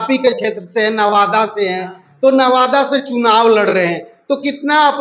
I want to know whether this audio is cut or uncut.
uncut